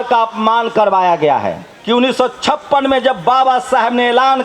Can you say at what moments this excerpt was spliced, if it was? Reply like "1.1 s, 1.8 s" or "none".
1.7 s